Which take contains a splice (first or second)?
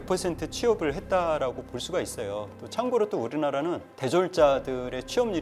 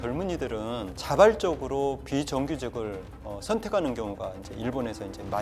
second